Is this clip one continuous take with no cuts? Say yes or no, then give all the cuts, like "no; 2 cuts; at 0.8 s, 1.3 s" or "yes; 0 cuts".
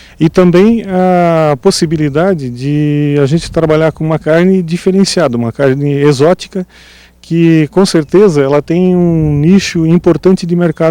no; 1 cut; at 0.9 s